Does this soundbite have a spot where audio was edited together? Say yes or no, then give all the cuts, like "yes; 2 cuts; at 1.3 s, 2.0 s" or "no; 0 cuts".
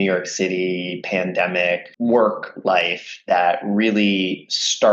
yes; 1 cut; at 1.9 s